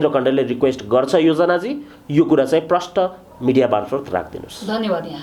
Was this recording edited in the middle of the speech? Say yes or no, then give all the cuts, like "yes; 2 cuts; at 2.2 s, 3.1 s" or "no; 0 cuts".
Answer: no; 0 cuts